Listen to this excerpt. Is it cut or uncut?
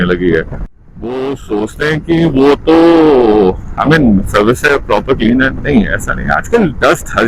uncut